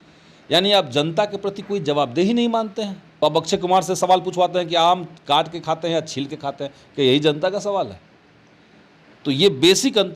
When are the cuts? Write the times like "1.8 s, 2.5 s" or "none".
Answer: 3.0 s